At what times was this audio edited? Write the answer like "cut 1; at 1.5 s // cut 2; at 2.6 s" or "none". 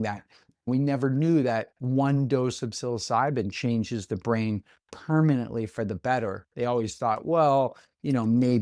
none